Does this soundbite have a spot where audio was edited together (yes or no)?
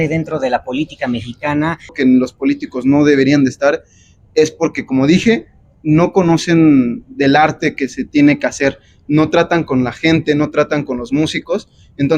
yes